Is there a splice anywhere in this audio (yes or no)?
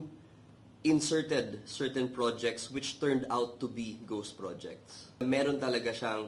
yes